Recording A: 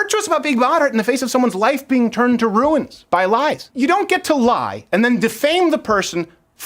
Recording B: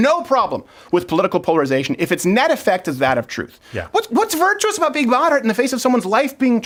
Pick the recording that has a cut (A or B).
A